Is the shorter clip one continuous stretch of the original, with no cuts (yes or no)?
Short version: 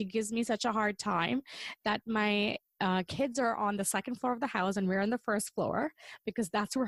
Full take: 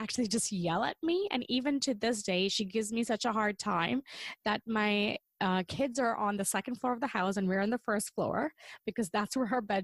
yes